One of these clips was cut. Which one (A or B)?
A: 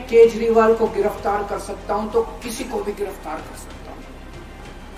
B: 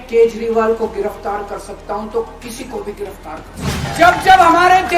B